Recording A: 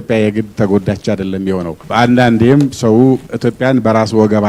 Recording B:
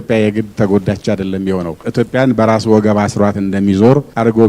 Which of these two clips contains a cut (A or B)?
B